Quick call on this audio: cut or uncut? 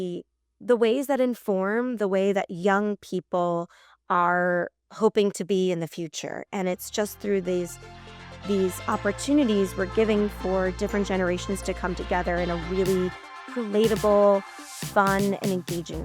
uncut